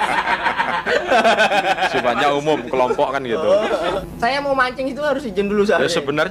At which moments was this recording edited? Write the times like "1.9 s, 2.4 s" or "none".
4.0 s